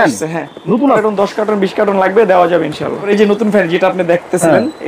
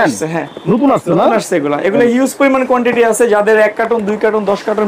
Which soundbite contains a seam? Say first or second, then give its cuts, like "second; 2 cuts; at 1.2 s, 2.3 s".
first; 2 cuts; at 1.0 s, 3.0 s